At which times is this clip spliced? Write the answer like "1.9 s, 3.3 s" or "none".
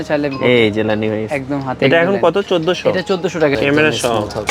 3.6 s